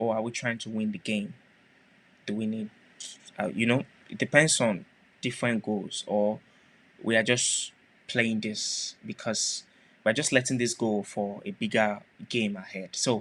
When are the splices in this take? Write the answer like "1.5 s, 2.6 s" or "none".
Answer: none